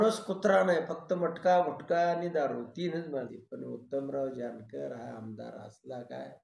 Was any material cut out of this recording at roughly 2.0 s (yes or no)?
no